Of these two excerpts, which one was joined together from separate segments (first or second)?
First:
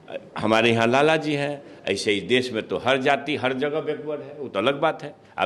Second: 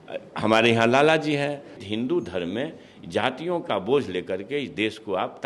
second